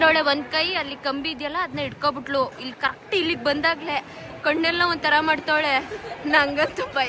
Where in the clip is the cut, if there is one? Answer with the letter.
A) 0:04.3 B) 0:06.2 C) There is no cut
C